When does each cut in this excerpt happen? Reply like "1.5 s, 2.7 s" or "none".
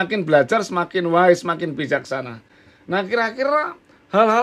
none